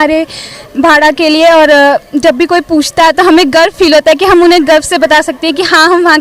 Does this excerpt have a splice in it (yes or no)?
no